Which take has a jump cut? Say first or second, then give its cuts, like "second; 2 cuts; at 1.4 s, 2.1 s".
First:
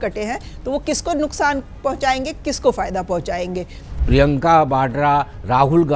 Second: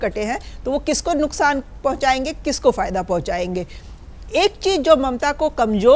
first; 1 cut; at 3.9 s